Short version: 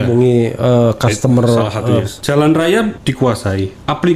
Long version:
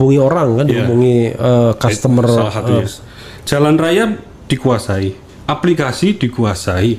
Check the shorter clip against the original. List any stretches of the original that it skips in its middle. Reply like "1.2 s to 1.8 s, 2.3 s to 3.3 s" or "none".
3.0 s to 3.4 s, 4.5 s to 4.9 s

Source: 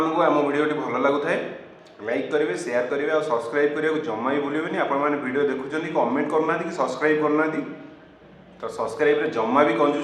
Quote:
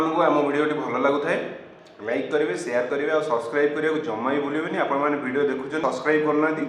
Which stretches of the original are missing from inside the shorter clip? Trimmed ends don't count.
5.8 s to 6.8 s

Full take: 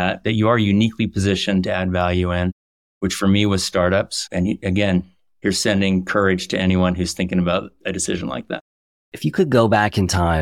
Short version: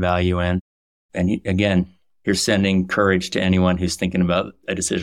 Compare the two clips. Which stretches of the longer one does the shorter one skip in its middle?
2.9 s to 4.2 s

